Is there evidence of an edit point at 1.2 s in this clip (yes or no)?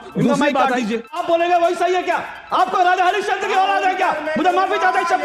yes